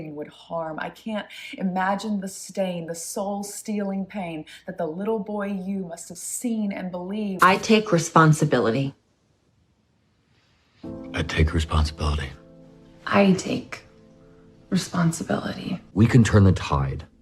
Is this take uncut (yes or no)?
no